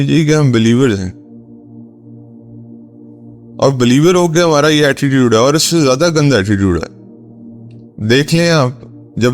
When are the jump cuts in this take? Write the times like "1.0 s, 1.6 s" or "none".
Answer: 1.4 s, 3.6 s